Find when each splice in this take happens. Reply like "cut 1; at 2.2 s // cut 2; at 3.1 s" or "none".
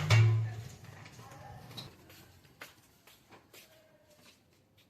cut 1; at 1.8 s